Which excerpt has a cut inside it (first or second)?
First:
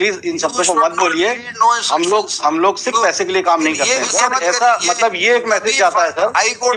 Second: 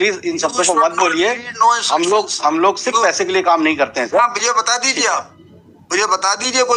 first